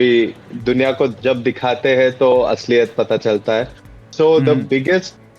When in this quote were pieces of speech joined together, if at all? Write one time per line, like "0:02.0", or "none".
0:03.8